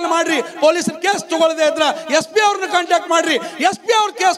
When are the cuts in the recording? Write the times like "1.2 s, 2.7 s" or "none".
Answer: none